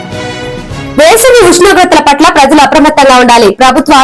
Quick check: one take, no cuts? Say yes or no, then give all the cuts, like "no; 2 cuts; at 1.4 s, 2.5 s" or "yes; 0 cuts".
no; 1 cut; at 0.9 s